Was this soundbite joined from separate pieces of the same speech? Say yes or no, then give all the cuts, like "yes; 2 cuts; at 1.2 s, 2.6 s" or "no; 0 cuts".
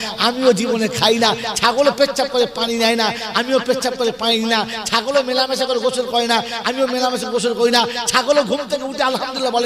no; 0 cuts